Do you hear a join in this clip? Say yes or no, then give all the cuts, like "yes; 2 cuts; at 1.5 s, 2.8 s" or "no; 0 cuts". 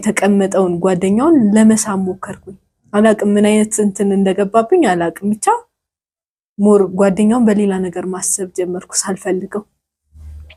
no; 0 cuts